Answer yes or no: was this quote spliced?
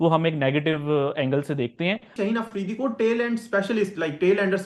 yes